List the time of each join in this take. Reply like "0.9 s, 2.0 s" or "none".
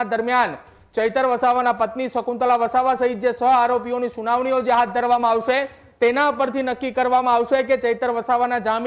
none